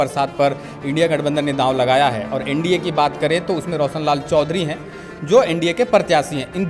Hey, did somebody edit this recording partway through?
no; 0 cuts

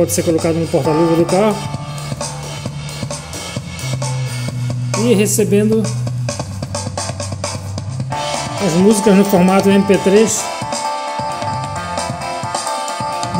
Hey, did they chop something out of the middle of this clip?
no; 0 cuts

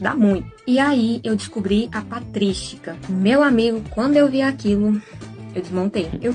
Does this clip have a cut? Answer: yes; 1 cut; at 1.0 s

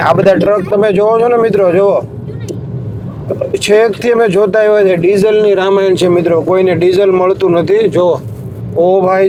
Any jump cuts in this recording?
no; 0 cuts

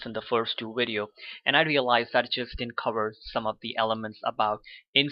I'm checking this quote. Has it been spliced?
no; 0 cuts

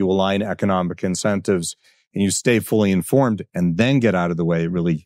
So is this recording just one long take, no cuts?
yes; 0 cuts

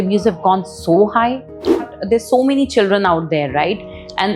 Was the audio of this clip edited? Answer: yes; 1 cut; at 1.8 s

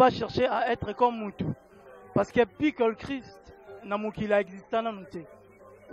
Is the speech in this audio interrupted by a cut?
no; 0 cuts

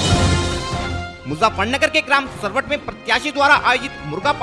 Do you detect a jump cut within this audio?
yes; 1 cut; at 1.0 s

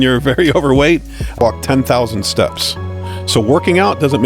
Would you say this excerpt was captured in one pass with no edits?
no; 1 cut; at 1.4 s

